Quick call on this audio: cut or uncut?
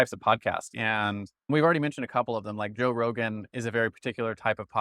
cut